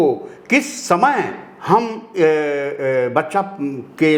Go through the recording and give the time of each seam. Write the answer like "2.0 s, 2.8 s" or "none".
none